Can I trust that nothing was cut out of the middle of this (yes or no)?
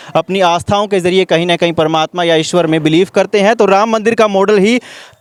yes